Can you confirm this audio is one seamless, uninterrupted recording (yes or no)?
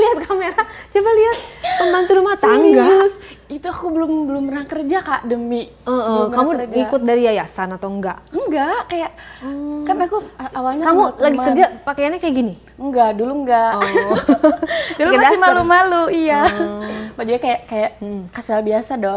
yes